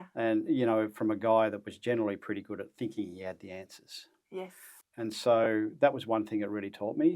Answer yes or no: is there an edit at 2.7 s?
no